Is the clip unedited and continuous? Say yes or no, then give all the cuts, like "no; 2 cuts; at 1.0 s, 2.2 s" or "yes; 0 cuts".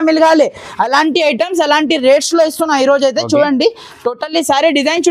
yes; 0 cuts